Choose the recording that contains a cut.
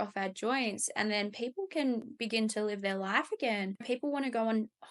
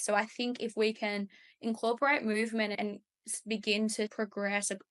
first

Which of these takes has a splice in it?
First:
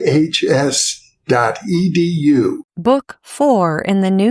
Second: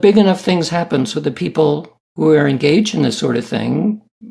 first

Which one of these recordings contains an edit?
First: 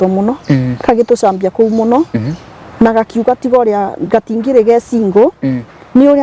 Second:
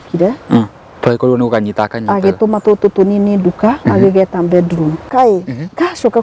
second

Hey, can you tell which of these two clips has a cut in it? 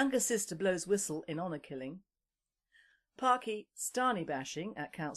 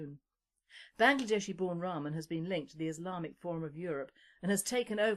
first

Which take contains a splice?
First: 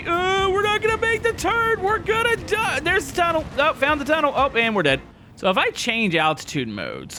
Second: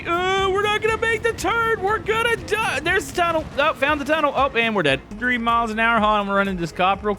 second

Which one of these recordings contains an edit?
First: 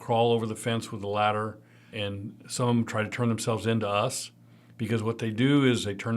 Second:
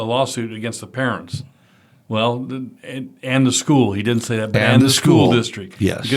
first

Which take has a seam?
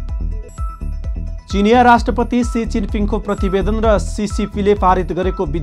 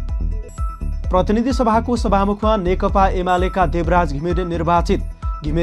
second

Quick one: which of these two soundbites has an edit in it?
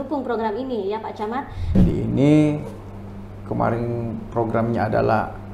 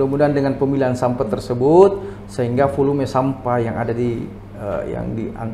first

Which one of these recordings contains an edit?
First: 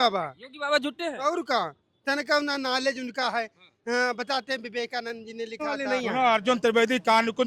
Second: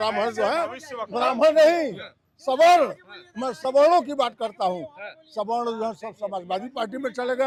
first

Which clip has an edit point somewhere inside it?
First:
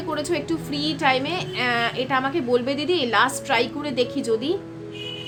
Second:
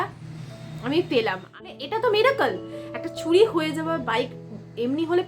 second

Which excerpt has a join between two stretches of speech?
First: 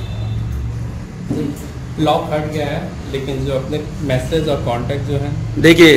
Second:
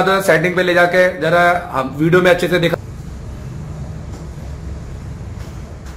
second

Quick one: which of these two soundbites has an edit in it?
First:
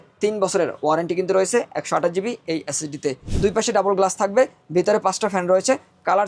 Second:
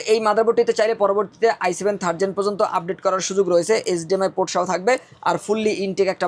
first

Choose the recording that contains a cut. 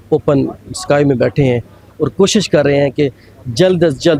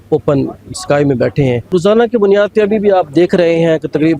second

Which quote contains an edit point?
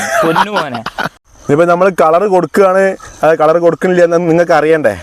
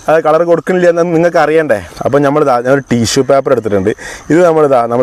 first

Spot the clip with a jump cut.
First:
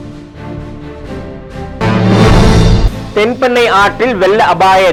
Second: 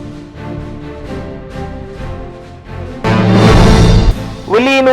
second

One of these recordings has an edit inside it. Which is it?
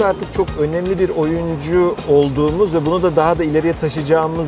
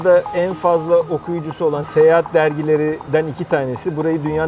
second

